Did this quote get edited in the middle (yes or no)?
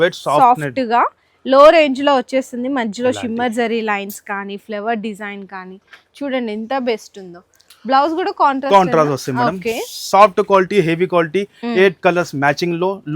no